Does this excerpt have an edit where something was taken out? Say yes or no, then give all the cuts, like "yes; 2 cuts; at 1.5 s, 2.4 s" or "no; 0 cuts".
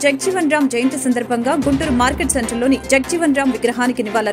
no; 0 cuts